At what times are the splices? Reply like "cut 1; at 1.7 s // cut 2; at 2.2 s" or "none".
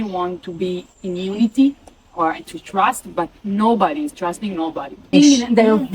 cut 1; at 0.9 s // cut 2; at 5.1 s